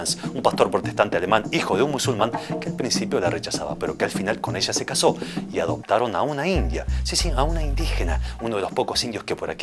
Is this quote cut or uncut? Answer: uncut